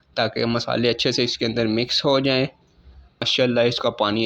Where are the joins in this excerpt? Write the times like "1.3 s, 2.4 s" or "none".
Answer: 3.3 s